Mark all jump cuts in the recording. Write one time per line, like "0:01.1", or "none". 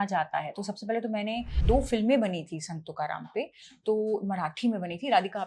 0:01.6

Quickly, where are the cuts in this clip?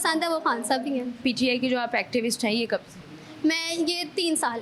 0:01.2

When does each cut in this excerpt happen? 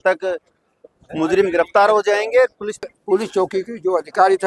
0:02.9

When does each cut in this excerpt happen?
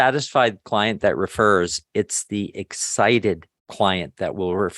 0:03.6

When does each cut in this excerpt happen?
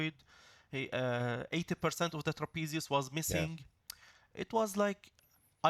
none

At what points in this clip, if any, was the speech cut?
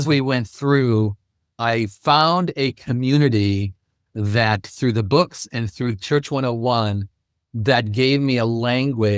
0:01.5

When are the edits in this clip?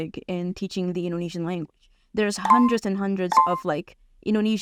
none

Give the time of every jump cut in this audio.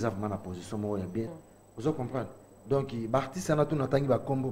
0:01.3

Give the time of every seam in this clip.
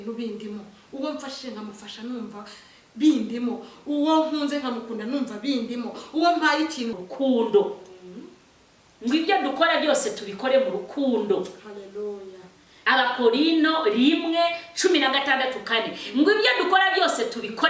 0:07.0

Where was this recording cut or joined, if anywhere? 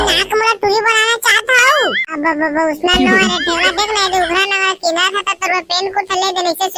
0:02.0

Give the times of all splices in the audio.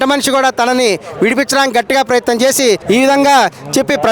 0:02.8

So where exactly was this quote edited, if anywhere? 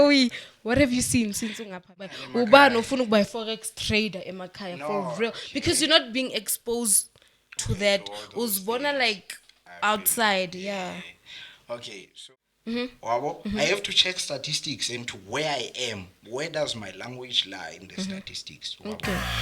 0:02.2
0:12.1

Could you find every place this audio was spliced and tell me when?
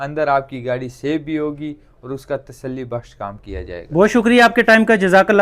none

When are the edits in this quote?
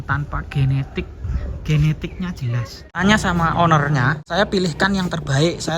0:03.0
0:04.3

